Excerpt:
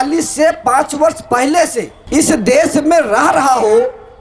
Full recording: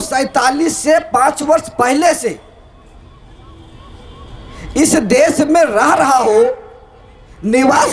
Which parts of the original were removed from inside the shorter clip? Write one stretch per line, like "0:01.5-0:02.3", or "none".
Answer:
0:02.4-0:04.6